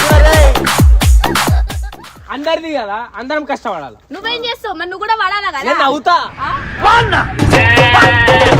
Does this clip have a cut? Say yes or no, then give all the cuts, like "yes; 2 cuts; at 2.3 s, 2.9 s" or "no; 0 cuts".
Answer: yes; 1 cut; at 2.0 s